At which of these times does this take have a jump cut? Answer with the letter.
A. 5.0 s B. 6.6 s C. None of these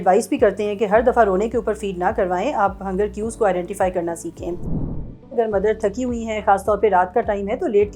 A